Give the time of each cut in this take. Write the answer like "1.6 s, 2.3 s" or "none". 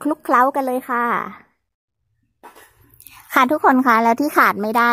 1.7 s